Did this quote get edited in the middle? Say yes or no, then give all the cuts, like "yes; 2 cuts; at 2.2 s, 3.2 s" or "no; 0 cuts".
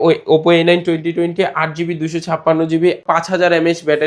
yes; 1 cut; at 3.0 s